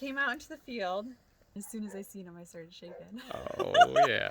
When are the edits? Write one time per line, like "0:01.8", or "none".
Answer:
0:01.6